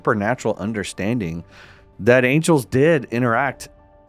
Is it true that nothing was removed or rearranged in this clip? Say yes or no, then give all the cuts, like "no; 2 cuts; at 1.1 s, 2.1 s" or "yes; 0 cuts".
yes; 0 cuts